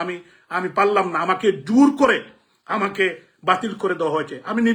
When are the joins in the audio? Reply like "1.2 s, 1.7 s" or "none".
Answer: none